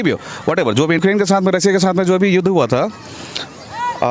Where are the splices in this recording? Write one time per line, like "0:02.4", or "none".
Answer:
0:01.0

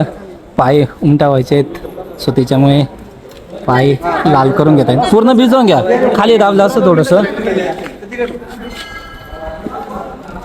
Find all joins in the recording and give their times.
none

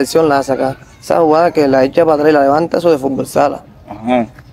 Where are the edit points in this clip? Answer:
none

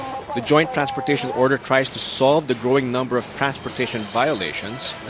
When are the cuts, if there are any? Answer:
0:03.8

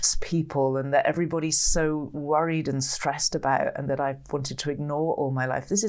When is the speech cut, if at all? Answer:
none

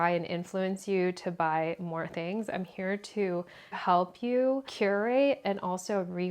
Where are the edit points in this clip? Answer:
0:03.8
0:04.7

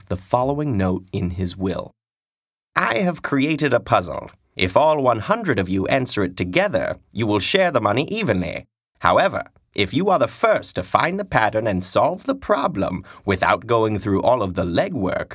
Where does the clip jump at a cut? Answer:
0:06.8

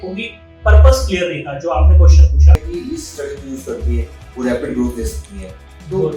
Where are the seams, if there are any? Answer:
0:02.6

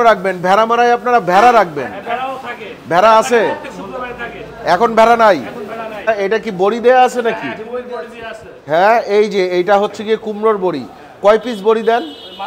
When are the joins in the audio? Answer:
0:06.1

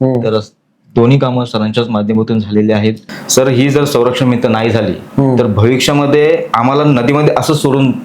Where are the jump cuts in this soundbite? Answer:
0:03.1

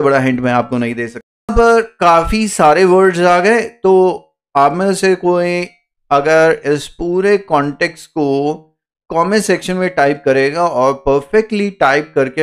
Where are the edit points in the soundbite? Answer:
0:01.4

